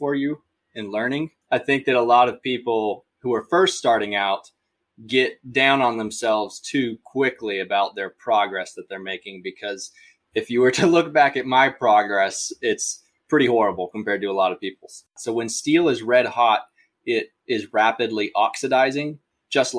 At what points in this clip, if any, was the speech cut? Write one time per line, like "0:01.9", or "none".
0:01.4
0:15.2